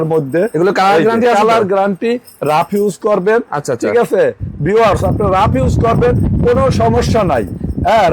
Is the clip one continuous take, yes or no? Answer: yes